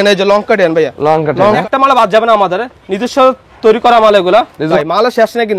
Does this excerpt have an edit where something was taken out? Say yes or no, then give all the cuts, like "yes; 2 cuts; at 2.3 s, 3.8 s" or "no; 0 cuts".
yes; 2 cuts; at 1.6 s, 4.7 s